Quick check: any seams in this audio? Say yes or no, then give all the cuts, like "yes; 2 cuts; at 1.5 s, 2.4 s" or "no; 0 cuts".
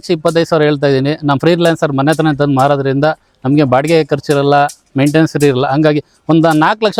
no; 0 cuts